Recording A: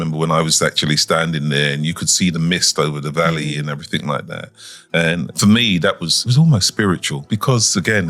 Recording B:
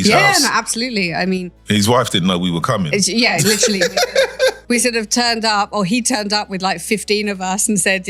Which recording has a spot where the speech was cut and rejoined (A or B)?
A